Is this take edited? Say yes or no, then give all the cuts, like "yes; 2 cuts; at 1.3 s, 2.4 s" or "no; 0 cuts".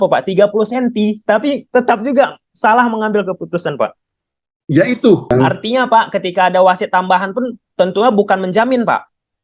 yes; 1 cut; at 5.3 s